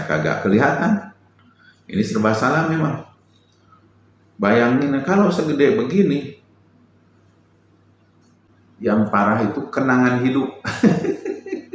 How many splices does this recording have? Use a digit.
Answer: 1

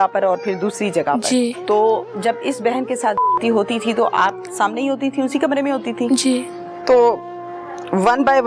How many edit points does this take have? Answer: 2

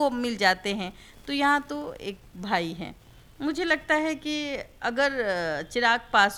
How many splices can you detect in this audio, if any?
0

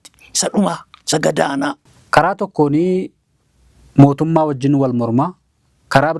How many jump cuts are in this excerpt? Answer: 1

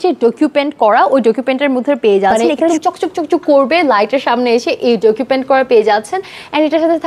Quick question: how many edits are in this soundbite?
1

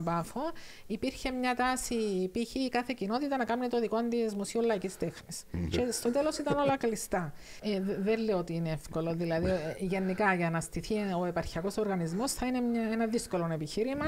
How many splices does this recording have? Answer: 1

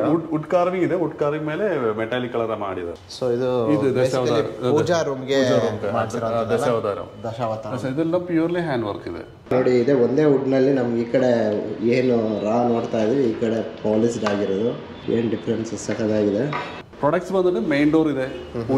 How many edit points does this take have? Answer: 3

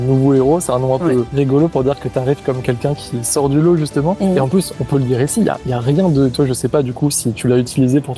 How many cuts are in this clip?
2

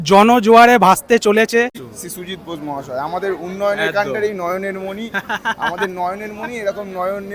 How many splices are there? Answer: 1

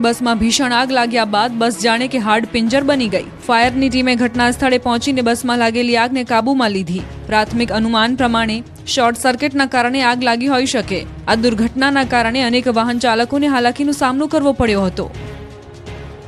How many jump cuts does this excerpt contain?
0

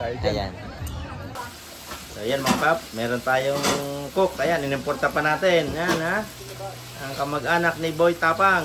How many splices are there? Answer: 1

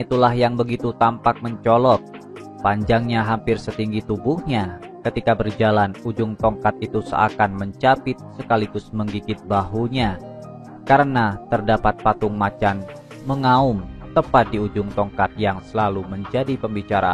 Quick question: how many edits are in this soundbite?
0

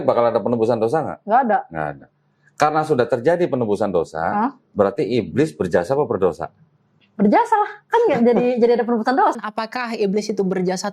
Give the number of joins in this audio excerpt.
1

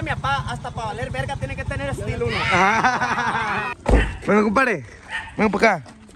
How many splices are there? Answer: 2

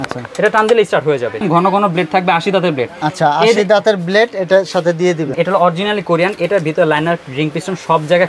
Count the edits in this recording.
2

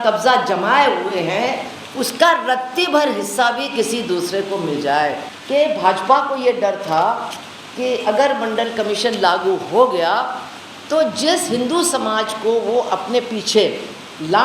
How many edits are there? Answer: 1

